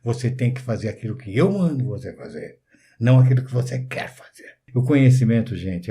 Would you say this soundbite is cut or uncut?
cut